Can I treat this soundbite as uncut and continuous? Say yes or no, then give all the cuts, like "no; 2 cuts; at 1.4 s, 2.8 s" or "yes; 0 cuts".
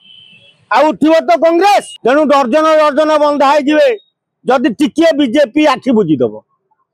no; 1 cut; at 1.9 s